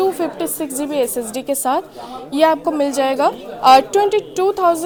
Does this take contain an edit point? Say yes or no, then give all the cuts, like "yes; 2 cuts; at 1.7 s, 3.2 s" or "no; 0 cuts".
no; 0 cuts